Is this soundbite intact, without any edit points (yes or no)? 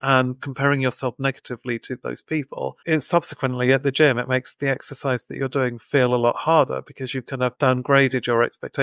no